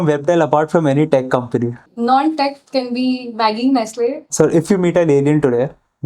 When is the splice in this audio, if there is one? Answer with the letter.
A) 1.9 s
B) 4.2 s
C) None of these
B